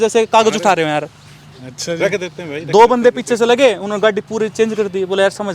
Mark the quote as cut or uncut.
uncut